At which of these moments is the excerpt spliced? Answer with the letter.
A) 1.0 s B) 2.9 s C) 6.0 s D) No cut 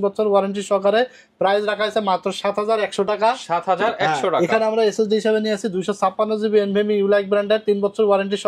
D